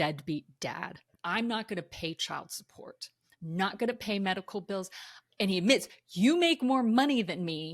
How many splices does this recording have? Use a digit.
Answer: 2